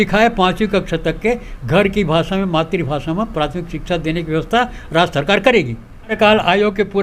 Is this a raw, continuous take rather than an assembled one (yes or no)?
no